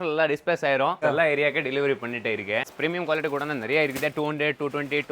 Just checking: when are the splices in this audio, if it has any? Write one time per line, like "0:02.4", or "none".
0:01.0
0:02.6